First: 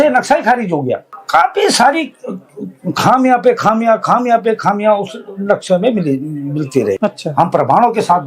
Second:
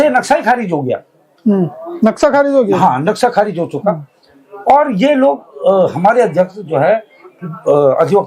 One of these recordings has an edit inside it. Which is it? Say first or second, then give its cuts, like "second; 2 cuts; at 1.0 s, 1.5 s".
first; 2 cuts; at 1.1 s, 7.0 s